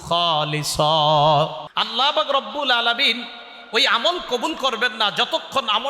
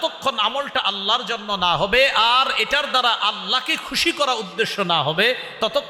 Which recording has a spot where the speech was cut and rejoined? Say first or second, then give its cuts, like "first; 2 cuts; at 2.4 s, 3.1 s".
first; 1 cut; at 1.7 s